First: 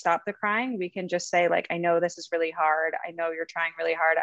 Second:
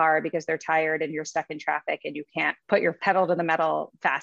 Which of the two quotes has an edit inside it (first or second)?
second